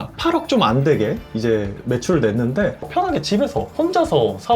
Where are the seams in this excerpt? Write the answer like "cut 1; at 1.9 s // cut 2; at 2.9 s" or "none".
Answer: cut 1; at 2.8 s